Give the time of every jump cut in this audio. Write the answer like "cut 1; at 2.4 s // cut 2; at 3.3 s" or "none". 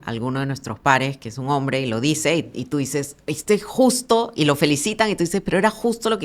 none